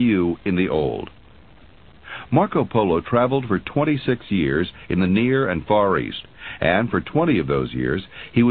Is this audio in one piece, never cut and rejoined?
yes; 0 cuts

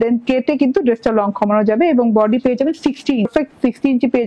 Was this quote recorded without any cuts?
no; 1 cut; at 3.3 s

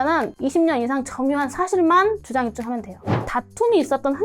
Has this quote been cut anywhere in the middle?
yes; 1 cut; at 3.2 s

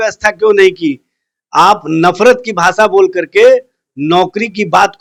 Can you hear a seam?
no; 0 cuts

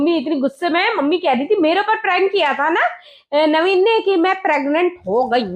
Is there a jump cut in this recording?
no; 0 cuts

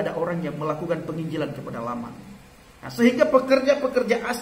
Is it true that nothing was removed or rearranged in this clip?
yes; 0 cuts

